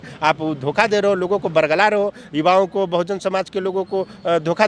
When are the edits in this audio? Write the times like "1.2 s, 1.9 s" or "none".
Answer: none

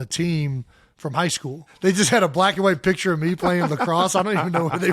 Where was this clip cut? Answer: 1.6 s

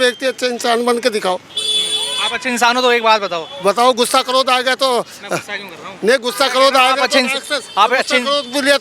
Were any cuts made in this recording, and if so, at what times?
none

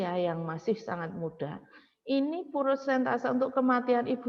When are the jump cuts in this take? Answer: none

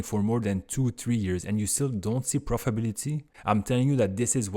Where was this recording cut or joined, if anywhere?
3.3 s

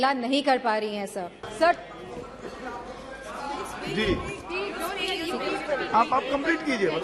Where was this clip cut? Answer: 1.4 s

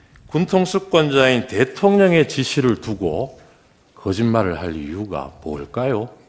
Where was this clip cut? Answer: none

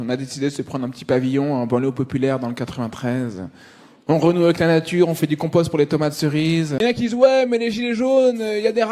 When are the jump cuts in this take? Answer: 6.8 s

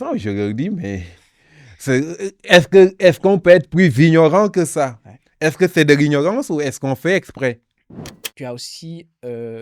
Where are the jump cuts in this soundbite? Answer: 8.2 s

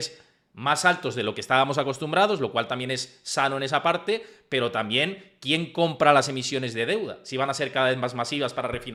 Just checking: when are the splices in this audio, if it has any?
none

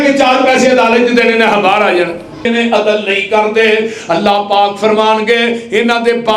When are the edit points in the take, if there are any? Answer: 2.4 s

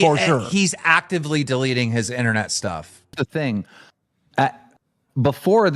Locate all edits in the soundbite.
3.0 s

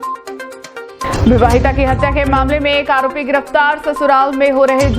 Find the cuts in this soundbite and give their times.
1.0 s

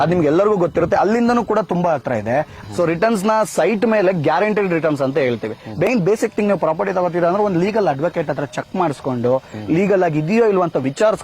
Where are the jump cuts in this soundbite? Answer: 2.5 s, 5.9 s

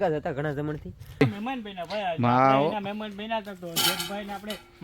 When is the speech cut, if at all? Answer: 1.2 s

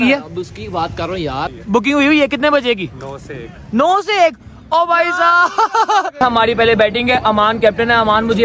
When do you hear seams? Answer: 1.5 s, 6.2 s

